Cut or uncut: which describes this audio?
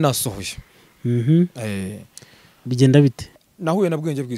cut